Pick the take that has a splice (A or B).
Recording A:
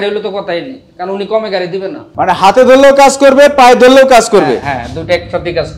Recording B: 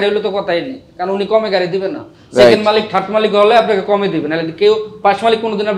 A